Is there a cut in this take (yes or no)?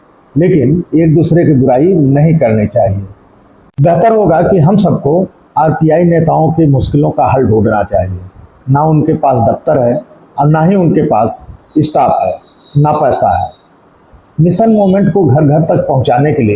no